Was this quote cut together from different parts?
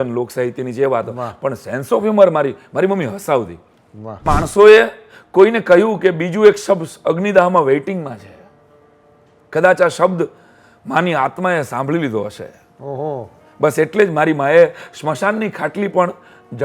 yes; 1 cut; at 4.2 s

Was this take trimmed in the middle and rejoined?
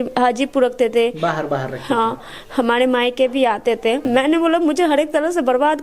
yes; 1 cut; at 4.0 s

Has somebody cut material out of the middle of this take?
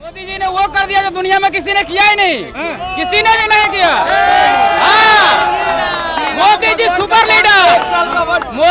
no; 0 cuts

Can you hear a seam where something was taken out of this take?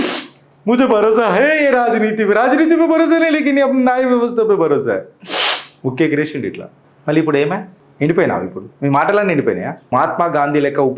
yes; 2 cuts; at 7.8 s, 9.9 s

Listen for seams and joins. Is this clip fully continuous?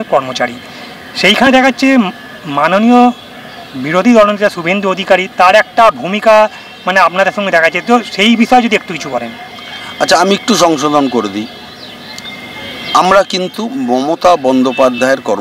yes; 0 cuts

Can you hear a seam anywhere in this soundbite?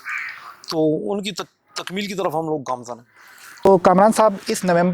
yes; 1 cut; at 3.4 s

